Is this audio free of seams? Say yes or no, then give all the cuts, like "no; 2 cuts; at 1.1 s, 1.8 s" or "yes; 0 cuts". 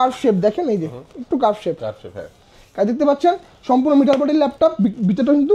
yes; 0 cuts